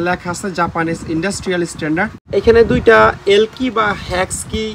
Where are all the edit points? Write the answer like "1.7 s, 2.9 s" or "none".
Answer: 2.3 s